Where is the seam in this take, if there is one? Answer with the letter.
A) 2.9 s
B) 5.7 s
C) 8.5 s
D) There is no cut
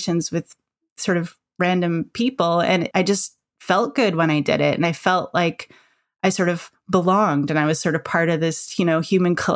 A